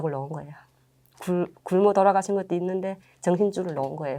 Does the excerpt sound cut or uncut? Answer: uncut